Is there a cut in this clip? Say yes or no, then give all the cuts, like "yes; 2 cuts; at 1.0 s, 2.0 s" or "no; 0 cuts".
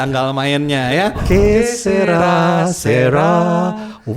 yes; 1 cut; at 1.2 s